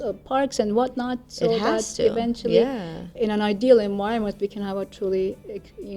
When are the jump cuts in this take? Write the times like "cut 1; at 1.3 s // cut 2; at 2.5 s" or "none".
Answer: cut 1; at 3.1 s